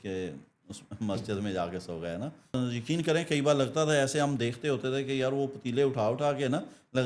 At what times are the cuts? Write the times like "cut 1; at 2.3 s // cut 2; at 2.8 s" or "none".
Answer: cut 1; at 2.5 s